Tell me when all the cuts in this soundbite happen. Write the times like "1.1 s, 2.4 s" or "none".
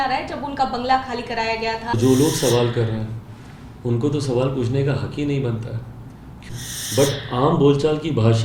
1.9 s, 6.4 s